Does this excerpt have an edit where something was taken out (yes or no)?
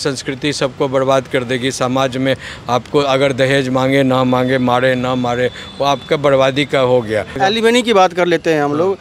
no